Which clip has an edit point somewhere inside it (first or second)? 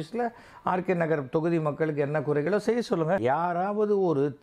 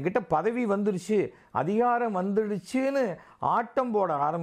first